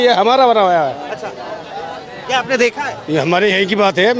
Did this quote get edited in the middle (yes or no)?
no